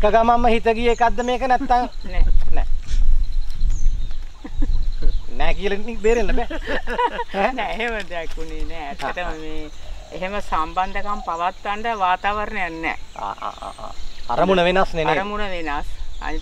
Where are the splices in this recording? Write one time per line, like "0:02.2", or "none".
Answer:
none